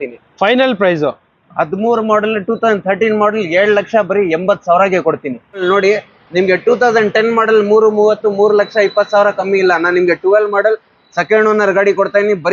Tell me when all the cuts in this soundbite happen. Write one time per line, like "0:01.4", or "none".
0:05.6

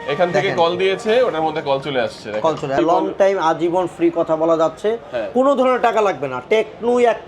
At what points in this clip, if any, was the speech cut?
0:02.8

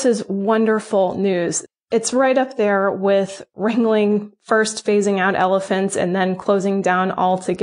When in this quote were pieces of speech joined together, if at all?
0:01.6

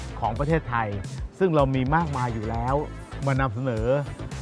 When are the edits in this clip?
none

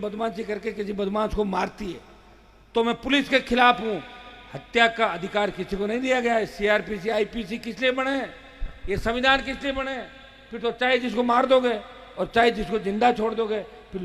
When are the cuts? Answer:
none

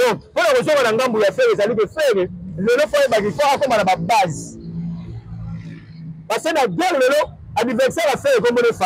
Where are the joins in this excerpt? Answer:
none

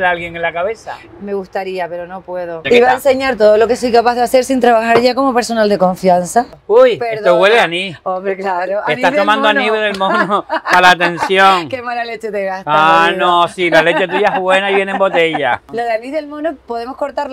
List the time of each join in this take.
0:02.6
0:06.6
0:15.7

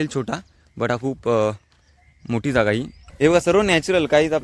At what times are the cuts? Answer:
0:03.0

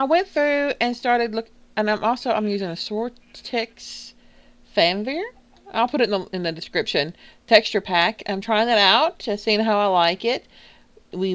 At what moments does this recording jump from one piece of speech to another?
0:05.9

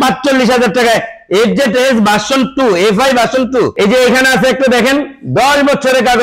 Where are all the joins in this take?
none

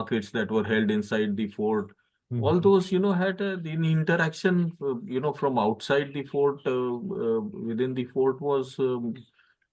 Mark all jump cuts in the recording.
none

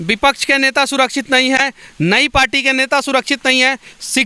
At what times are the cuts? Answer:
none

